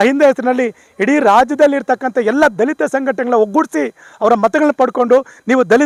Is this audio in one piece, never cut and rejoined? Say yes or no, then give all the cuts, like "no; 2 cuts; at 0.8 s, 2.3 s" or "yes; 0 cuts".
yes; 0 cuts